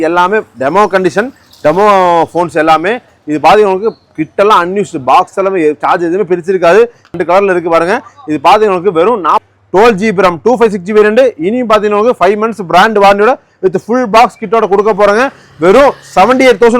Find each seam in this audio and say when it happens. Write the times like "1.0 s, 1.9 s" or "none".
7.1 s, 9.5 s